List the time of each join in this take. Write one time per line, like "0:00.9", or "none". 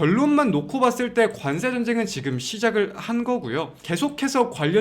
0:03.8

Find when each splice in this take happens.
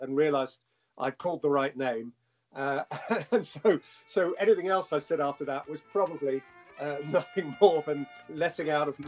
0:08.2

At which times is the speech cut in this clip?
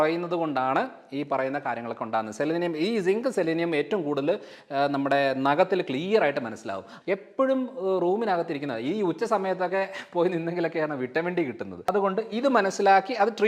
0:06.8
0:11.9

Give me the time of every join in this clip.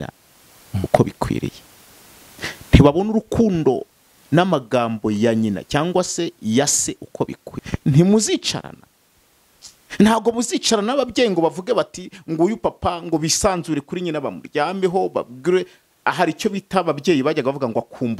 0:07.5

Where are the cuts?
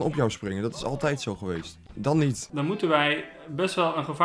0:01.8
0:02.5

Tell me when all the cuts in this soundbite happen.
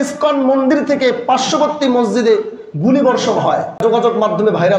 0:03.9

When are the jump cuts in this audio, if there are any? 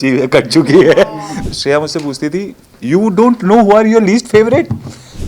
0:01.3

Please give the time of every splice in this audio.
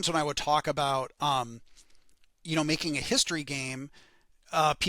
none

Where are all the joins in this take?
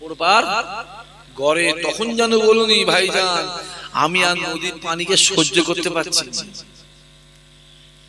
none

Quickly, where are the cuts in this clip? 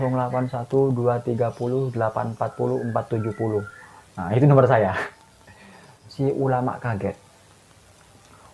0:06.0

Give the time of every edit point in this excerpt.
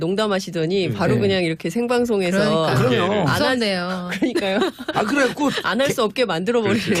none

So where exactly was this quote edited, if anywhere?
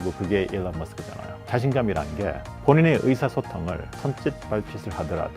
0:01.3

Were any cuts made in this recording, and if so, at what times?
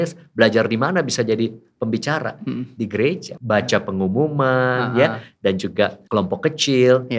0:03.3
0:06.0

